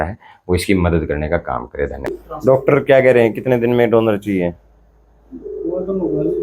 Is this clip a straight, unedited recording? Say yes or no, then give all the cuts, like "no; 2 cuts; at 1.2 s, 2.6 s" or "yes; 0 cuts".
no; 1 cut; at 2.2 s